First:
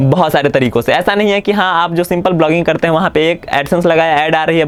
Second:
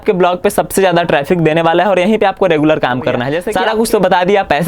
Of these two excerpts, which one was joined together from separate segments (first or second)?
second